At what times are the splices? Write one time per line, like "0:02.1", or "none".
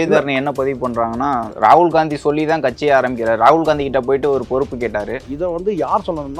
0:05.2

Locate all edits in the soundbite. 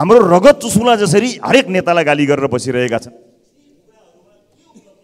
none

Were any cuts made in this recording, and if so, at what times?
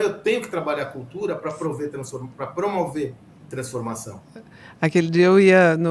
none

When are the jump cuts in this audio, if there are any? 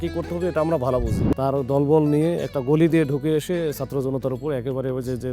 0:01.2

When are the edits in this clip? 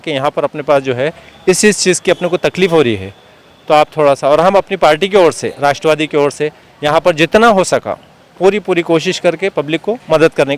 none

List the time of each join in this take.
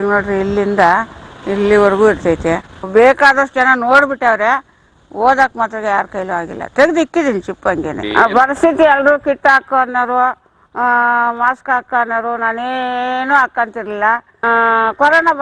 0:02.7
0:08.0
0:14.3

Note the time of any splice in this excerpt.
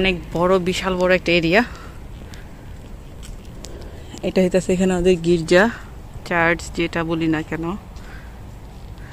none

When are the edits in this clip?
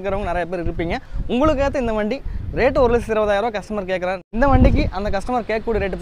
0:04.2

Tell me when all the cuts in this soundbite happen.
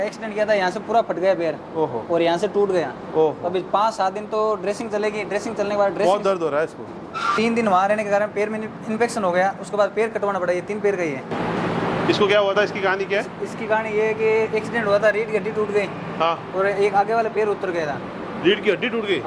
0:07.3
0:11.3

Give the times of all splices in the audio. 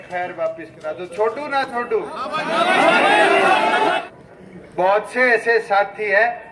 0:04.0

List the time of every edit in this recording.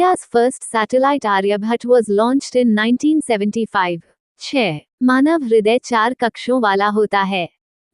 0:04.5

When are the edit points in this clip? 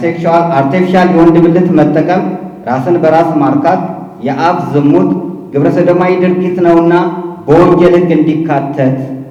none

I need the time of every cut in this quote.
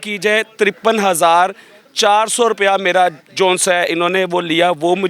none

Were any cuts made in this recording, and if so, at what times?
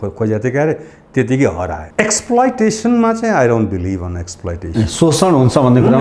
0:01.8

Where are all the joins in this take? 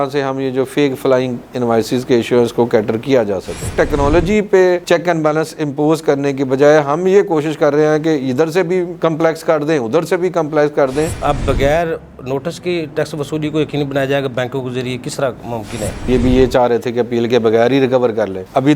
0:03.7
0:11.1
0:16.1

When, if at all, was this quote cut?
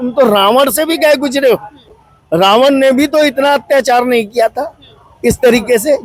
none

